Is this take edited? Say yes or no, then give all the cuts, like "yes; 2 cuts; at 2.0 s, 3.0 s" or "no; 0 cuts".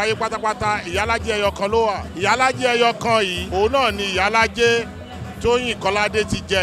yes; 2 cuts; at 2.1 s, 3.4 s